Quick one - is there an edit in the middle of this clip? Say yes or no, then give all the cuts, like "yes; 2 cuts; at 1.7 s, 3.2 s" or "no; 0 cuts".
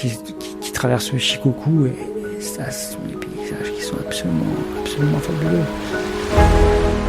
yes; 1 cut; at 5.8 s